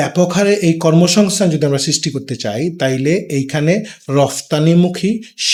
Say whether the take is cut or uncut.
uncut